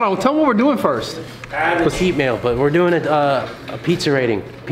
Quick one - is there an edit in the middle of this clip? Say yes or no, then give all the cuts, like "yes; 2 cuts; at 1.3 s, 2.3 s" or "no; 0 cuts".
no; 0 cuts